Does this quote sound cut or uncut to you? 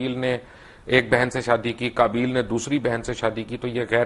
uncut